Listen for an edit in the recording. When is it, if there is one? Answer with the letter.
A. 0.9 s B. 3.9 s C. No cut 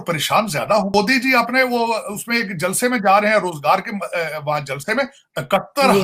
A